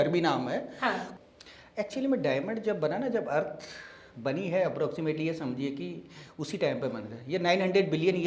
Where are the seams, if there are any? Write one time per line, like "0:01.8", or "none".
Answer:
0:01.1